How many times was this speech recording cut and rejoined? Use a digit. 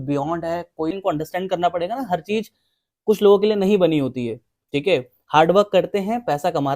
1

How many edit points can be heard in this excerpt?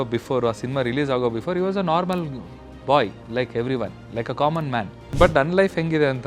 1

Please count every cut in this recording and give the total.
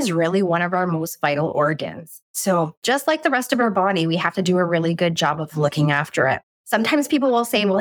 2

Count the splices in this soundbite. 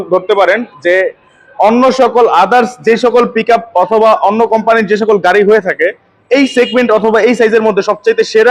0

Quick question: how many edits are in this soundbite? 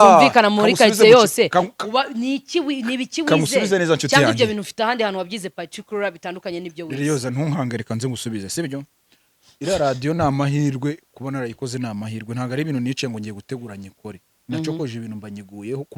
0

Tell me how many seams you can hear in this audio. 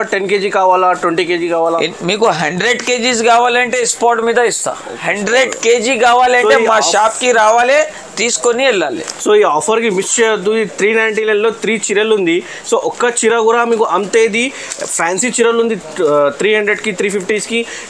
0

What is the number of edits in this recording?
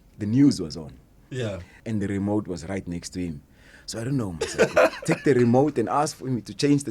1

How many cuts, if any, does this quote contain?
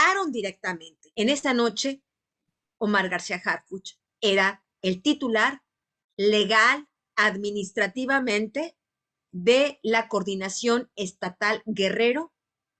1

